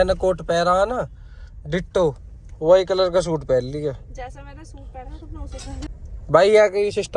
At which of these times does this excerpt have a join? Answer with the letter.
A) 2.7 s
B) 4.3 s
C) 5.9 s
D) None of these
C